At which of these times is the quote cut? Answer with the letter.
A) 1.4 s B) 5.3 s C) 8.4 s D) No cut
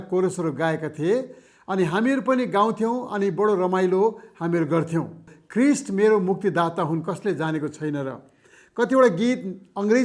B